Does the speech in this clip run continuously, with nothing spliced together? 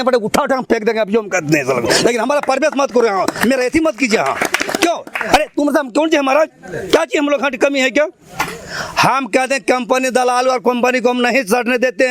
yes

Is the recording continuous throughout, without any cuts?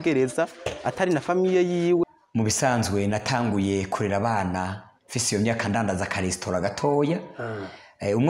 no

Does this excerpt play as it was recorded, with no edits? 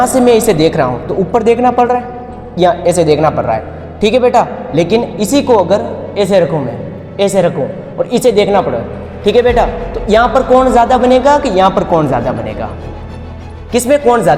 yes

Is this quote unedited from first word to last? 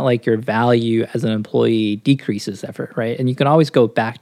yes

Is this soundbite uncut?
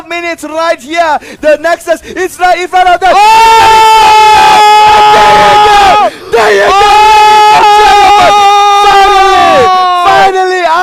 yes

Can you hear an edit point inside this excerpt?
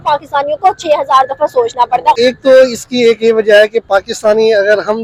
no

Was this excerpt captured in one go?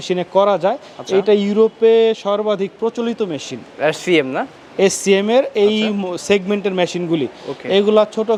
yes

